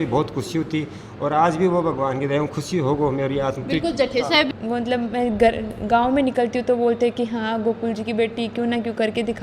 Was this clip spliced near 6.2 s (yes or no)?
no